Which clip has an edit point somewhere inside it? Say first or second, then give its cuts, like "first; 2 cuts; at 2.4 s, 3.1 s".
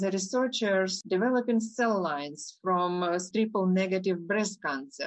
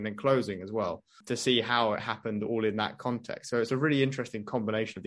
first; 2 cuts; at 1.0 s, 3.3 s